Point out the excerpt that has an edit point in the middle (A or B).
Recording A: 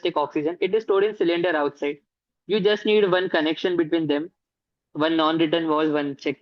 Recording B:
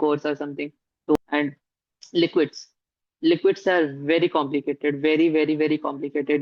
B